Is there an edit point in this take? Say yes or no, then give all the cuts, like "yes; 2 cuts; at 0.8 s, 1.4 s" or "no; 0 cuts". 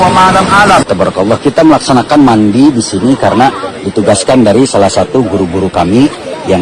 yes; 1 cut; at 1.0 s